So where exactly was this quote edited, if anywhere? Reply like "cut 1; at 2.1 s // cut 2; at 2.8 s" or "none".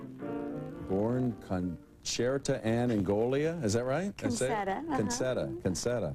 none